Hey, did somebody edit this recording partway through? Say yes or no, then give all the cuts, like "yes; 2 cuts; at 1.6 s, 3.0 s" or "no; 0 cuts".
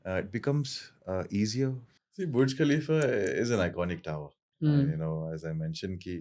yes; 1 cut; at 1.9 s